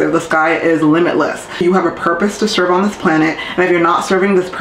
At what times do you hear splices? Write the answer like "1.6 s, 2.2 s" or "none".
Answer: 1.6 s